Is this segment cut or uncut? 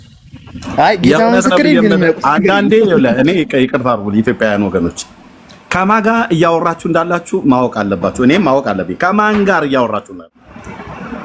cut